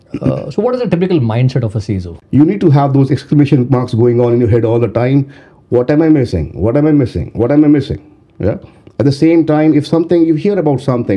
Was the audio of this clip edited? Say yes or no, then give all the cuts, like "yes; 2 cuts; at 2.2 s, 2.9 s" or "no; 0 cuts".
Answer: yes; 1 cut; at 2.2 s